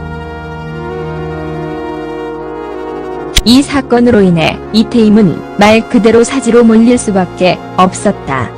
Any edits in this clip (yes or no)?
yes